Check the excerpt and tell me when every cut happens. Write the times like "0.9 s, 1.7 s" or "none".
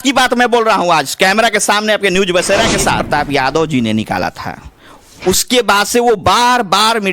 3.0 s